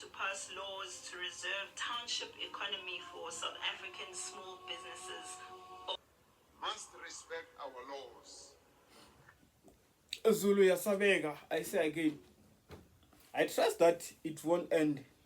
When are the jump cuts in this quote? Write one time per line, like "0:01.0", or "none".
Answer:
0:06.0